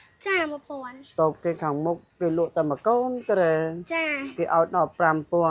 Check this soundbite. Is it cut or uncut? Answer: uncut